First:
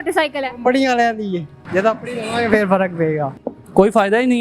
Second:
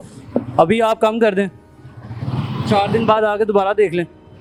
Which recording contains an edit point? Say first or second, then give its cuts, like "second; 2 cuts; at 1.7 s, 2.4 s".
first; 2 cuts; at 1.6 s, 3.3 s